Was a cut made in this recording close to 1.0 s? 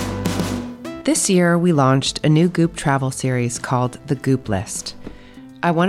yes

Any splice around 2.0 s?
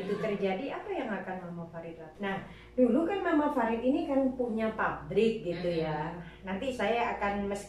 yes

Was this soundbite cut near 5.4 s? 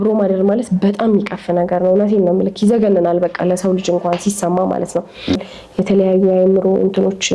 yes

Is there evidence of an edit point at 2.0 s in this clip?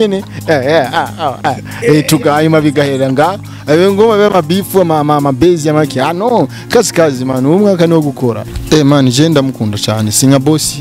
no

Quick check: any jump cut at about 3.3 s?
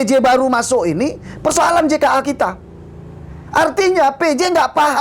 no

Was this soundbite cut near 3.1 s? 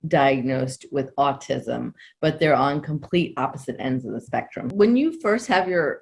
no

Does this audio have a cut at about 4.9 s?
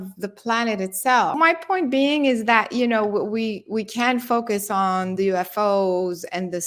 no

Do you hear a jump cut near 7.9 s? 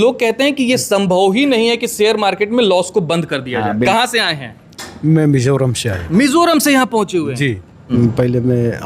yes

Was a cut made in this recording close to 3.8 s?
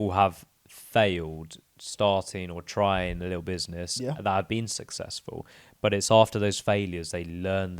no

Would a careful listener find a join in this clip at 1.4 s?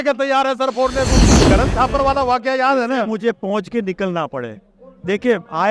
yes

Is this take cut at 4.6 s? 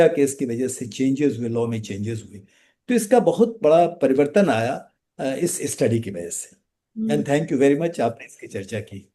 no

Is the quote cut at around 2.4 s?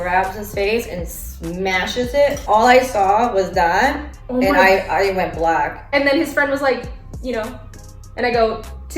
yes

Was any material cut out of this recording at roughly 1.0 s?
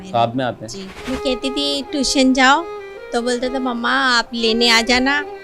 yes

